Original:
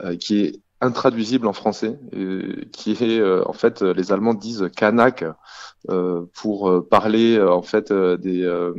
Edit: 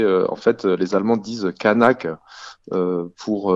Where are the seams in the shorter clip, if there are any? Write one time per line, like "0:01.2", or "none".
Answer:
none